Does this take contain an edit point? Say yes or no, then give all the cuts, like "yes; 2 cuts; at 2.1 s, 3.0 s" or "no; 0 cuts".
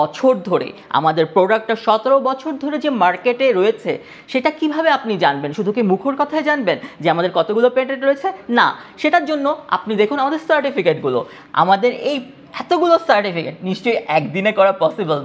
no; 0 cuts